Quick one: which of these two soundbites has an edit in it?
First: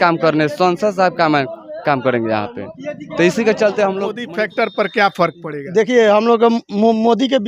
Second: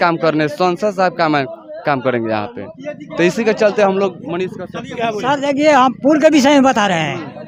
first; 1 cut; at 4.2 s

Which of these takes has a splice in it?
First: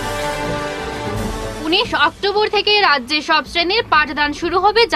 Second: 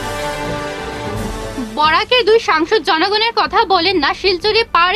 second; 1 cut; at 1.1 s

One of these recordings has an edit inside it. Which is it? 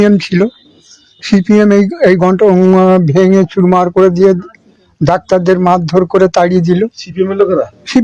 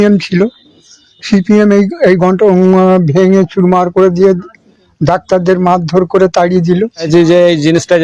second; 1 cut; at 7.1 s

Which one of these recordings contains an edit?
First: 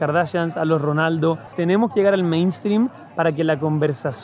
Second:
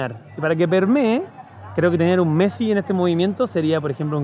first; 1 cut; at 1.5 s

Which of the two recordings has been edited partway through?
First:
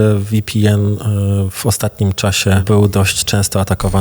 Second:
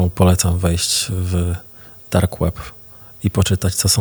first; 1 cut; at 2.6 s

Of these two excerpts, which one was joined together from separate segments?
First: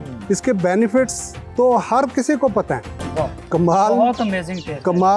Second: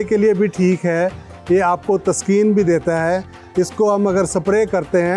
first; 1 cut; at 3.0 s

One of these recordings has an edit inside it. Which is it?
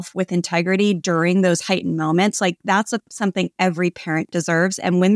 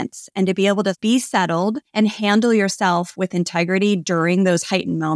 second; 2 cuts; at 1.0 s, 1.8 s

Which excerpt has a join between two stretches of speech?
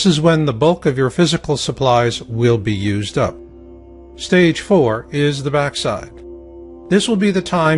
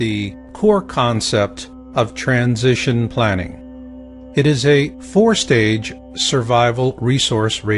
second; 1 cut; at 2.9 s

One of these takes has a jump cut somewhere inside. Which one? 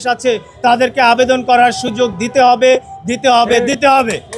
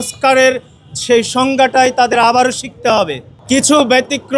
second; 1 cut; at 3.4 s

